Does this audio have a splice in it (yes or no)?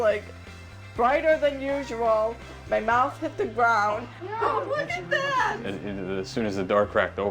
no